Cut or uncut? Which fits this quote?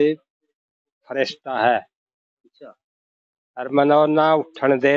uncut